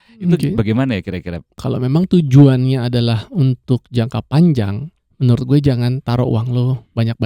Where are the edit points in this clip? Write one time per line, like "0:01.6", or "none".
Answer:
0:01.6